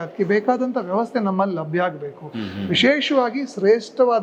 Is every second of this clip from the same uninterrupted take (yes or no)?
yes